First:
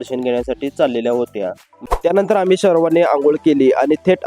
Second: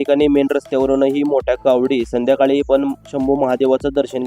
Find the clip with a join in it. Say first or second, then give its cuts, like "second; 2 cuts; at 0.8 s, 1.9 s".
first; 1 cut; at 1.7 s